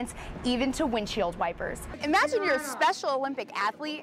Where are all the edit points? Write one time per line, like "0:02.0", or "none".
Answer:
0:01.9